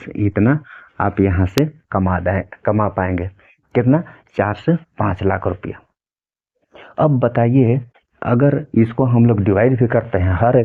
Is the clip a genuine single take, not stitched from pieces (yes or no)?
yes